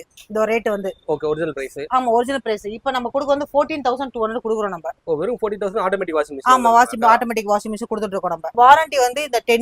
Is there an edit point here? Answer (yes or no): yes